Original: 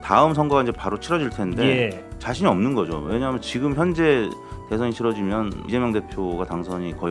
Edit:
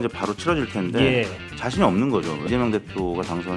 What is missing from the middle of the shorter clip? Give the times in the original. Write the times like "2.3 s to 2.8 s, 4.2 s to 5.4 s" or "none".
3.0 s to 5.6 s